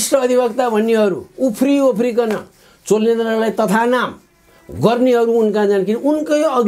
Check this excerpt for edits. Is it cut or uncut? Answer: uncut